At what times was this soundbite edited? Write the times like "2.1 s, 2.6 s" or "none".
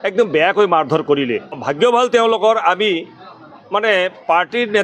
1.6 s